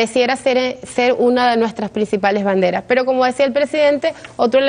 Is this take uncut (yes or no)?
yes